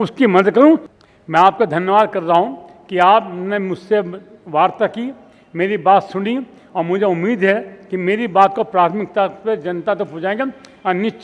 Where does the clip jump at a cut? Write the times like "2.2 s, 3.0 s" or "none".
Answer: 0.9 s